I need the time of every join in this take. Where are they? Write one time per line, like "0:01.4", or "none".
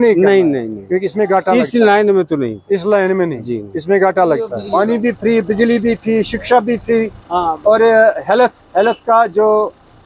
0:04.7